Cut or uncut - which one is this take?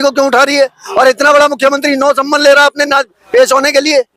uncut